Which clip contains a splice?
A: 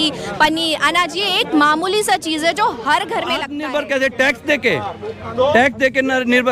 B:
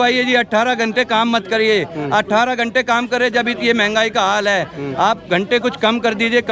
A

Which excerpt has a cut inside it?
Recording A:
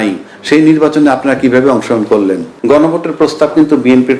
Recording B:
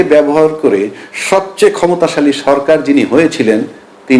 A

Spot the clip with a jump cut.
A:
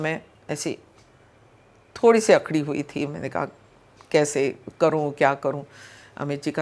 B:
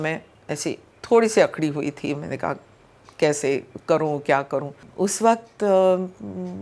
B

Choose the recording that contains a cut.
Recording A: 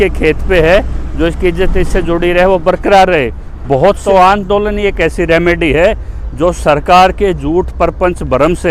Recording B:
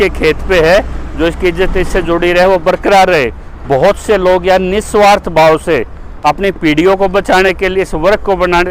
A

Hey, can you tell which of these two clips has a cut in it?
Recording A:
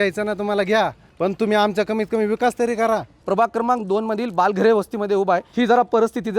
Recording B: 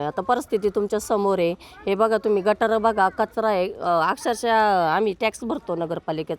A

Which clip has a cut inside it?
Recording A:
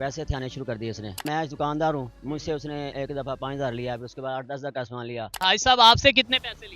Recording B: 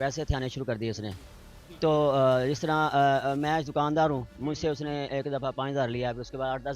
A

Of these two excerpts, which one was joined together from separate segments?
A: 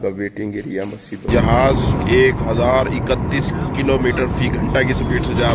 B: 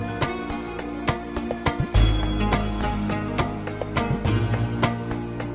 A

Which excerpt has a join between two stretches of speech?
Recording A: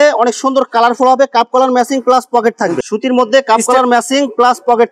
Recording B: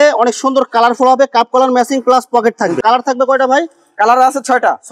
A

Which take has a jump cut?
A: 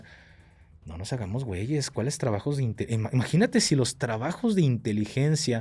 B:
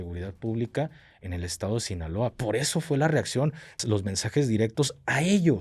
B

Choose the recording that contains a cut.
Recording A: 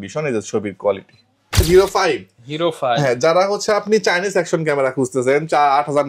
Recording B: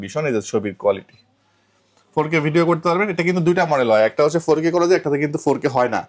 A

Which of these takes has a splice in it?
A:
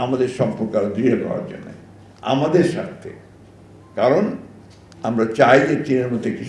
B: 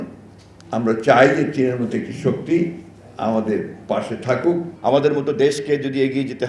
B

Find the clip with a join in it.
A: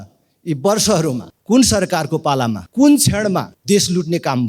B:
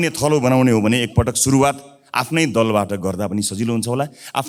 A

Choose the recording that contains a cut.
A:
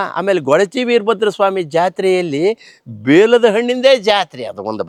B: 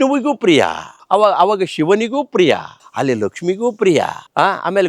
B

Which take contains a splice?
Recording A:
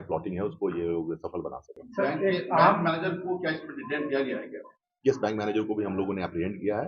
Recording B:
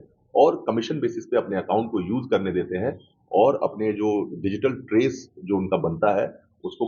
A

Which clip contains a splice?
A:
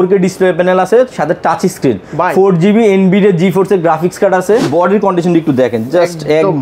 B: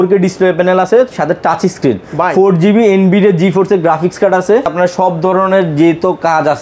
A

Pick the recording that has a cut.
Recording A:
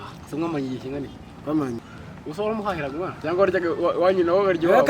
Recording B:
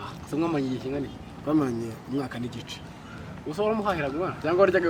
A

